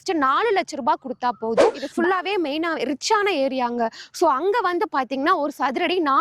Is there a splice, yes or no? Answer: yes